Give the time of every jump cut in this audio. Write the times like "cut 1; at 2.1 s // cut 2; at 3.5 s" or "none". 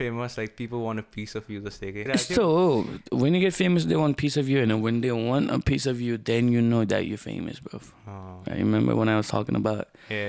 cut 1; at 2.0 s